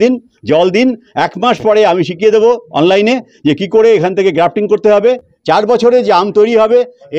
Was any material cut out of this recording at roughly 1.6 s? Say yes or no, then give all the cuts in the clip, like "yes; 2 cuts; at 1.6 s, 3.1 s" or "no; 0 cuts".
no; 1 cut; at 5.3 s